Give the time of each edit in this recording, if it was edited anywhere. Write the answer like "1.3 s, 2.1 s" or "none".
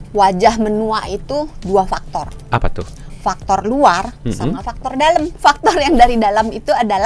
5.3 s